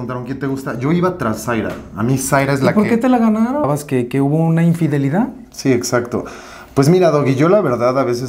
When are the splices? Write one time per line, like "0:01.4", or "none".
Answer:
0:03.7